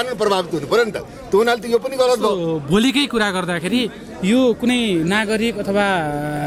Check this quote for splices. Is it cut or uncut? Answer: uncut